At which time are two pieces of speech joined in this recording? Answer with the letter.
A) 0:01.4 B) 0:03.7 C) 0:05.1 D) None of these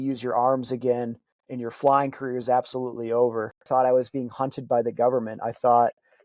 B